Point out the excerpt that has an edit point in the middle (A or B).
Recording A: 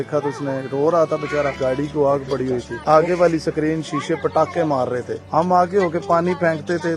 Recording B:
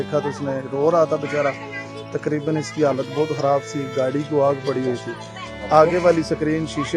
A